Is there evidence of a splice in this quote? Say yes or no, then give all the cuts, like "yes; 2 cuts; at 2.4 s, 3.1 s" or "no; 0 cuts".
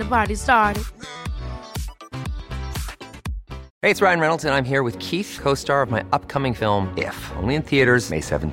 yes; 1 cut; at 3.6 s